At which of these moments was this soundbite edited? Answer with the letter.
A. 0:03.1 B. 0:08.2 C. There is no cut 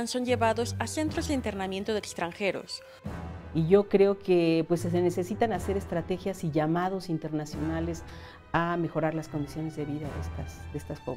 A